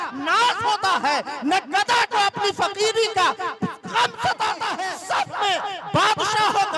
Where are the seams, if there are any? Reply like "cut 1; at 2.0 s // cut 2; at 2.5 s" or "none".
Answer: cut 1; at 4.9 s